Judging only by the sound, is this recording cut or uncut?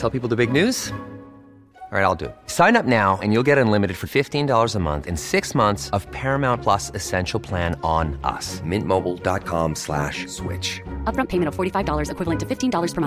uncut